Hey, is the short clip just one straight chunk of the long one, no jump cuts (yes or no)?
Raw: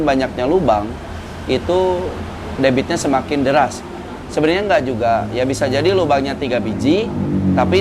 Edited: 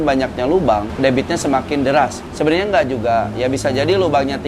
no